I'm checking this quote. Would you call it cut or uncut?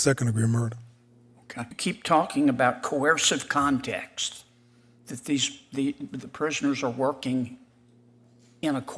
cut